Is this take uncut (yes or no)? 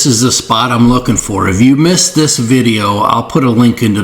yes